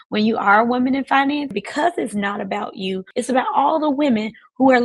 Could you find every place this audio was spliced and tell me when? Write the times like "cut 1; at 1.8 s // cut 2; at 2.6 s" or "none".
cut 1; at 1.5 s // cut 2; at 3.1 s